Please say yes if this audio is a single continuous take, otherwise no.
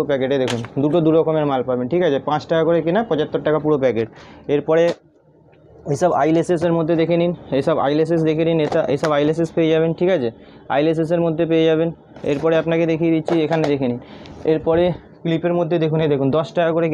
yes